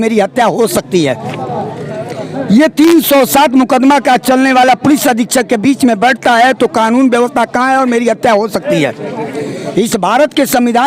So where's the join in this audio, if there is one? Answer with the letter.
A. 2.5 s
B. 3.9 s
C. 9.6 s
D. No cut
C